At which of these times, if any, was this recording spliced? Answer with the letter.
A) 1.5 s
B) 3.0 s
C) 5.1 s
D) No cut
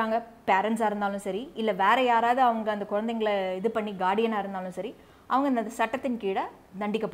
D